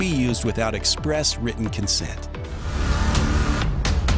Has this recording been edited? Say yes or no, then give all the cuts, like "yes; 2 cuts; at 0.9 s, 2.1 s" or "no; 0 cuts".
yes; 1 cut; at 2.5 s